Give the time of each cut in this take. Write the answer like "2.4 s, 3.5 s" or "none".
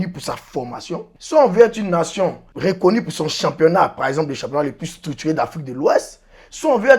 1.1 s, 2.5 s